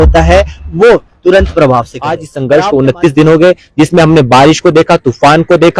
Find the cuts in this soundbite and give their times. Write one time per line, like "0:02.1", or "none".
0:02.3

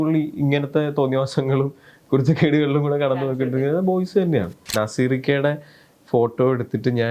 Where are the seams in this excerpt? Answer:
0:04.7

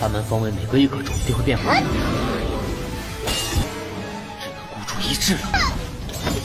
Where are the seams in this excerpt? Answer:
none

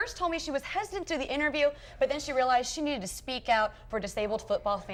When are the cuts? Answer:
none

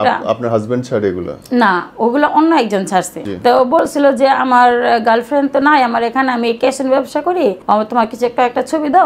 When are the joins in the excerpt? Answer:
0:03.2
0:07.6

